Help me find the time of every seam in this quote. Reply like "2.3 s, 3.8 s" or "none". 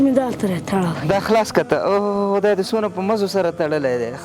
1.0 s

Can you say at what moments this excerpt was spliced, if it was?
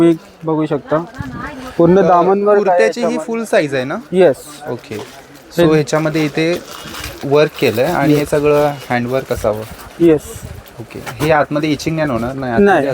none

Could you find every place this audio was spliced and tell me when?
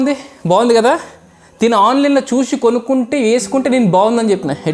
none

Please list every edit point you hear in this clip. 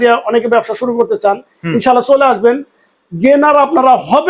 none

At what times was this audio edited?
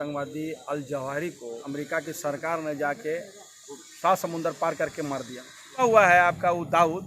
1.6 s, 5.8 s

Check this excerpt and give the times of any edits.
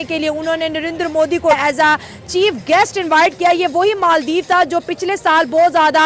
1.6 s

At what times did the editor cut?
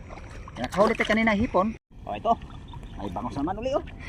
1.8 s

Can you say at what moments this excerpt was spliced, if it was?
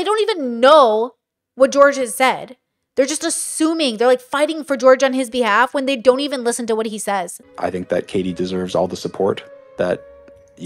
7.4 s

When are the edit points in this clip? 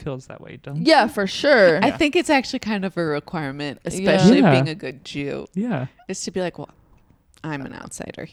none

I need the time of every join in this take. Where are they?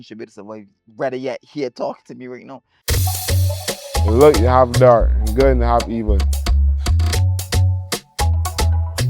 2.7 s

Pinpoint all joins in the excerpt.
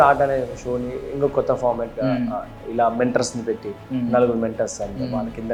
none

